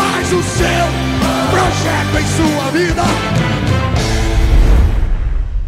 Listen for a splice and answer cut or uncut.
cut